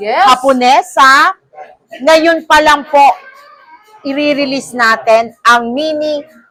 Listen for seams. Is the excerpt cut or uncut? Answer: uncut